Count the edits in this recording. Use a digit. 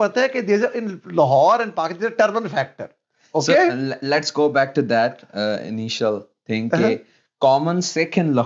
0